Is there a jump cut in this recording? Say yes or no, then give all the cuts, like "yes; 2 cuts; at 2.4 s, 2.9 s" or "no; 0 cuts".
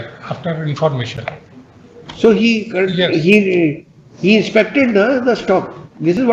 no; 0 cuts